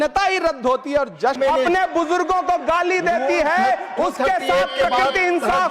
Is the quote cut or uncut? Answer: cut